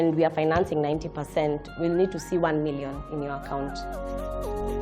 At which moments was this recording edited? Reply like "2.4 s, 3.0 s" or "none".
3.8 s